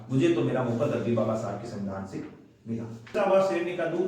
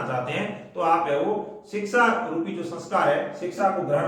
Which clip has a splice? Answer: first; 1 cut; at 3.1 s

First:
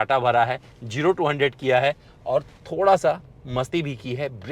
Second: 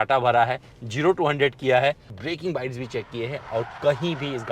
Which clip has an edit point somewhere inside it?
second; 1 cut; at 2.1 s

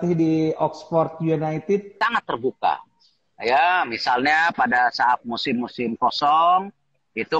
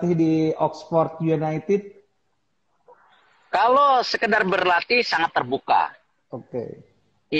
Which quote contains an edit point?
first; 1 cut; at 1.9 s

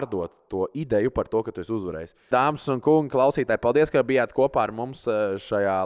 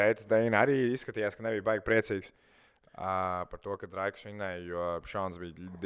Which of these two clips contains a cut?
first; 1 cut; at 2.3 s

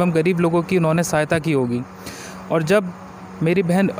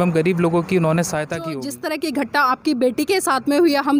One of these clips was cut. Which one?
second; 1 cut; at 1.6 s

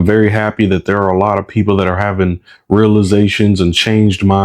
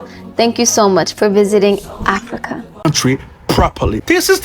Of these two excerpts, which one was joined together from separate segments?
second; 1 cut; at 2.8 s

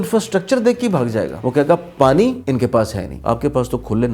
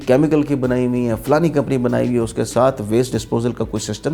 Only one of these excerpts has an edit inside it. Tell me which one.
first; 2 cuts; at 1.4 s, 2.7 s

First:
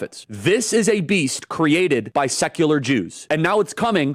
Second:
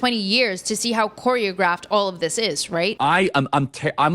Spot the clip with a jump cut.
second; 1 cut; at 3.0 s

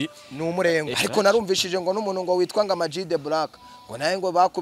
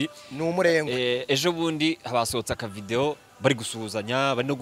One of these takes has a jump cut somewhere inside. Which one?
first; 1 cut; at 1.0 s

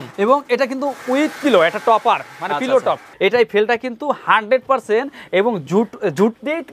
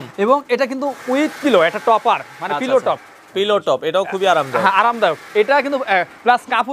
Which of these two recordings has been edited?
first; 1 cut; at 3.1 s

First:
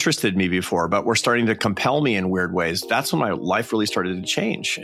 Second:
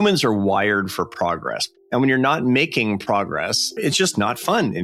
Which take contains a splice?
second; 2 cuts; at 1.6 s, 3.8 s

